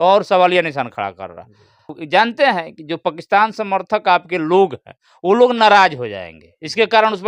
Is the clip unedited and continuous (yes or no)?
no